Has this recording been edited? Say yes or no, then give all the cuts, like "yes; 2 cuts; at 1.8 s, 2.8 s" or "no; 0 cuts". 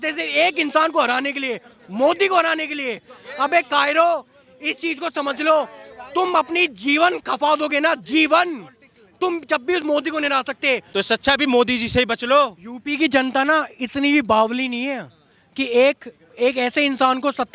yes; 1 cut; at 10.9 s